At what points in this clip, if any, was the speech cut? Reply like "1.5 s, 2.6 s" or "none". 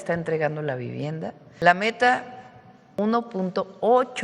1.5 s, 2.8 s